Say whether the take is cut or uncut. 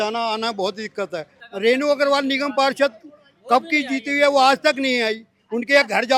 cut